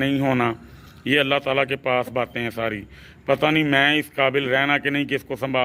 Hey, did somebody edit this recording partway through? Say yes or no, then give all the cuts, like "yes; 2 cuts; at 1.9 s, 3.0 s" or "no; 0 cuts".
no; 0 cuts